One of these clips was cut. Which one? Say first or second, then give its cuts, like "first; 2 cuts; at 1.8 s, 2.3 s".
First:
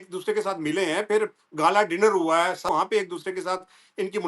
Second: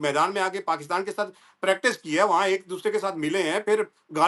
first; 1 cut; at 2.7 s